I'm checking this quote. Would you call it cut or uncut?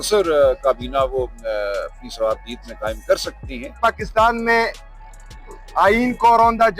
cut